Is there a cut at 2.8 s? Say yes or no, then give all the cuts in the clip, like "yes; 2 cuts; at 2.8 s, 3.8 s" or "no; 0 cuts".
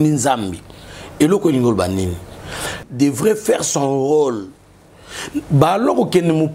yes; 1 cut; at 2.8 s